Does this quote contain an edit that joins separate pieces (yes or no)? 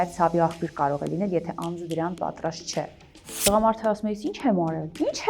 yes